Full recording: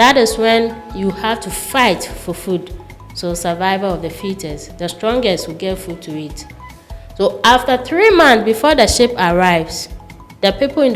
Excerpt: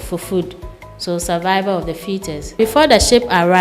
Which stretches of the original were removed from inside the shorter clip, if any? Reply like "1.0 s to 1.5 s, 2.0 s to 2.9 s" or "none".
4.7 s to 8.4 s